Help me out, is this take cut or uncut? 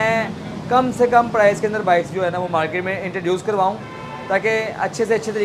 uncut